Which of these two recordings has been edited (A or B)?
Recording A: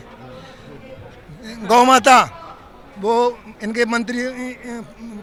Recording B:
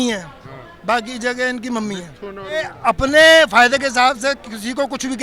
B